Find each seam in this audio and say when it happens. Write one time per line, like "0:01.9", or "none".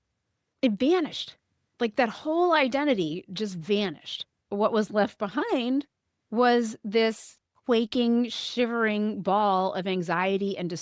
0:04.4